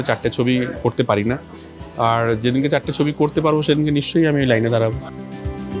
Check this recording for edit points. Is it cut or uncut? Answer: uncut